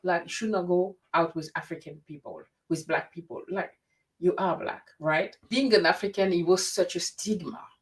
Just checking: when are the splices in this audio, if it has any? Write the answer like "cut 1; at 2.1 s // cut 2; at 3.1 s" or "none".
cut 1; at 5.5 s